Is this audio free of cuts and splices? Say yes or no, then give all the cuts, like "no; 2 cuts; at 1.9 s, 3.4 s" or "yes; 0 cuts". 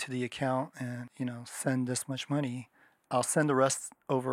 no; 1 cut; at 1.0 s